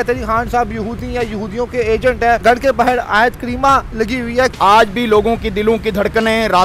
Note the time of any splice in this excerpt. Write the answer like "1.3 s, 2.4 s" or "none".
2.4 s, 4.5 s